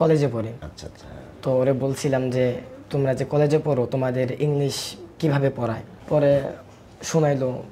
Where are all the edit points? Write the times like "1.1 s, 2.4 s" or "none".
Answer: 5.9 s